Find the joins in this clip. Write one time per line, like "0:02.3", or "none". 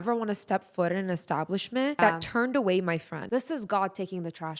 0:02.0
0:03.1